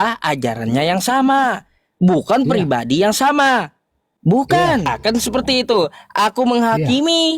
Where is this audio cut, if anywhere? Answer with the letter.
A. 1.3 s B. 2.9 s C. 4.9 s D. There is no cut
C